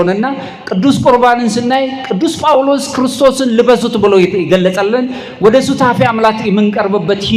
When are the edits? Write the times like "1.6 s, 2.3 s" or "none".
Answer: none